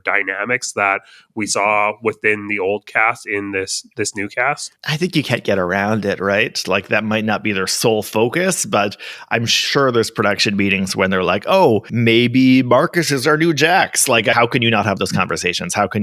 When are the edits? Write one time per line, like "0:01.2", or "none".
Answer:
0:11.9
0:14.3